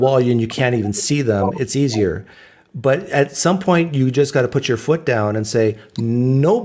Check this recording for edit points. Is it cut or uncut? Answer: cut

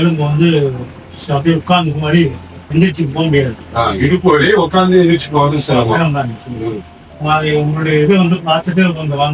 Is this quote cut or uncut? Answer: uncut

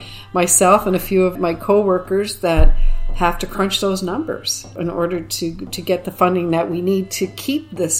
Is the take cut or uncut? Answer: cut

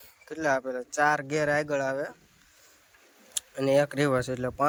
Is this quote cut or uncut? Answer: uncut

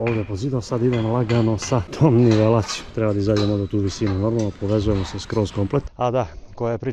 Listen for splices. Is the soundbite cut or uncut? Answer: cut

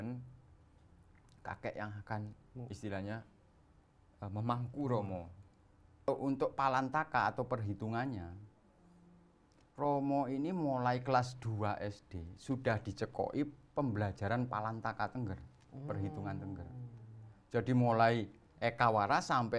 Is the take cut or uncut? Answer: cut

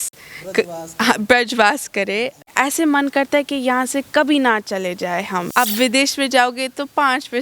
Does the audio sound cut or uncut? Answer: cut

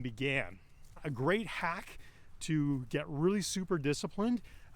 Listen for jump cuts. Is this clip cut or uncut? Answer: cut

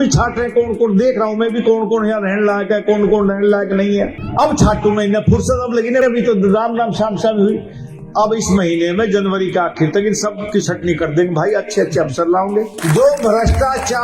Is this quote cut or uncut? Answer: cut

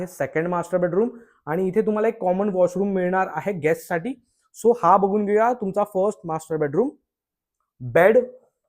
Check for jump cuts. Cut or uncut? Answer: uncut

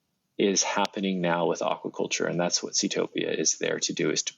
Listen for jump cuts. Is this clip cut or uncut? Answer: uncut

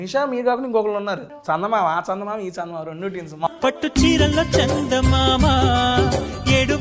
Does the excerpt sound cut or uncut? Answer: cut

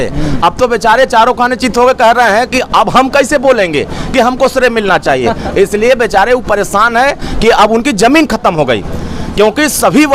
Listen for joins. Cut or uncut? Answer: uncut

